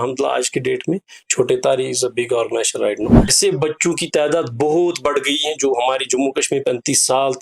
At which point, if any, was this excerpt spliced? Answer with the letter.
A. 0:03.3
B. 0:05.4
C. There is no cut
A